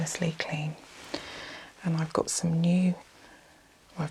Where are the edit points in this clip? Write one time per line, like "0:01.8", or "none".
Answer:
none

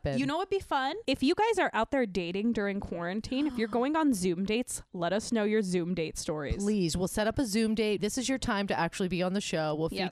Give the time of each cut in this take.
0:01.0

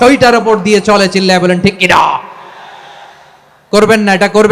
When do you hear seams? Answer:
none

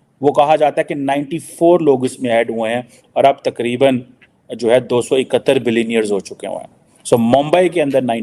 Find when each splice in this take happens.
none

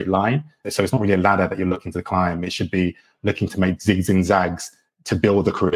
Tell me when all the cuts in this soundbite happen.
none

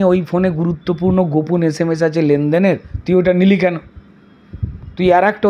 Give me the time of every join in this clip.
none

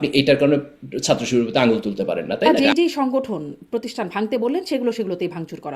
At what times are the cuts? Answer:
0:02.5

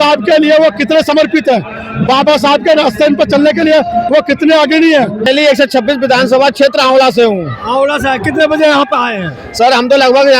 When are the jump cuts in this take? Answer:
0:05.3

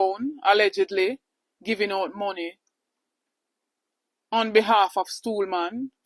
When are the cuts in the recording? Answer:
none

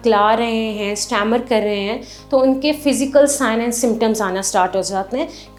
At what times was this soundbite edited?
none

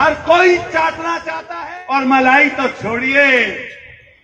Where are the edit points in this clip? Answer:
0:01.2

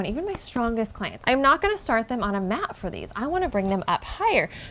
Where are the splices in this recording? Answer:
0:01.1

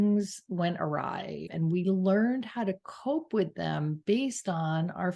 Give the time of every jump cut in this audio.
0:01.5

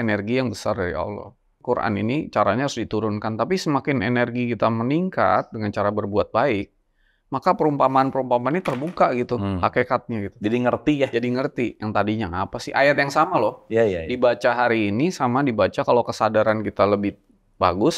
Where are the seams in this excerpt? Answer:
0:01.5

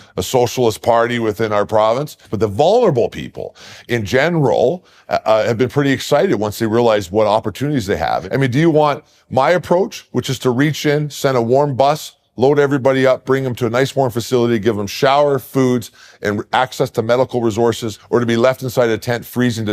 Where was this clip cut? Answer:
0:02.2
0:08.2
0:17.9

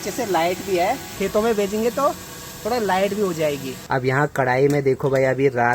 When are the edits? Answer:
0:01.1
0:03.7

